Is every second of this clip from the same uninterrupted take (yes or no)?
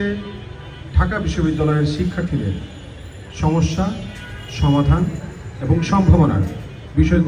yes